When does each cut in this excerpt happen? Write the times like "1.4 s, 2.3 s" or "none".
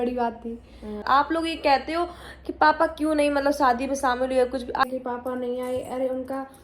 1.0 s, 4.8 s